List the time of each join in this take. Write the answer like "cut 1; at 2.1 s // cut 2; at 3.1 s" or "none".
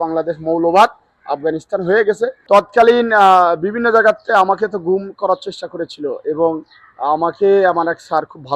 none